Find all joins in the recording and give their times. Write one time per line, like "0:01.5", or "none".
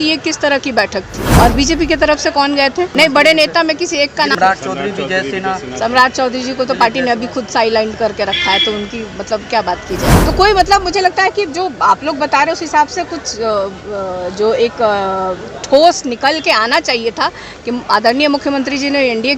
0:01.2
0:02.9
0:04.4
0:10.2